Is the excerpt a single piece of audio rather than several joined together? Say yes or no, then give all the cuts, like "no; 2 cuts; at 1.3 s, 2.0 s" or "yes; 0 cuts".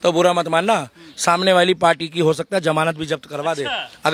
yes; 0 cuts